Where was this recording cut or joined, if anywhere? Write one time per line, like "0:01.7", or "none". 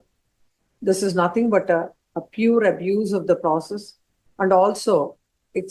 none